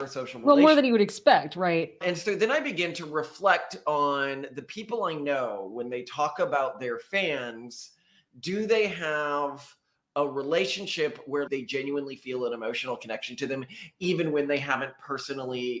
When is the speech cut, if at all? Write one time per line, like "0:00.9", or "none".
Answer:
0:01.9
0:11.5